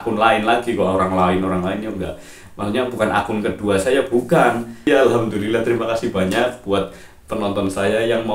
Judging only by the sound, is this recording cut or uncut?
cut